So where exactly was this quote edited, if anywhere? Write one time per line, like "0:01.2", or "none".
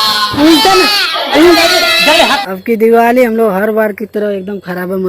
0:02.3